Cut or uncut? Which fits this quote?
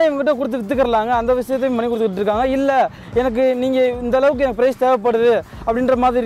uncut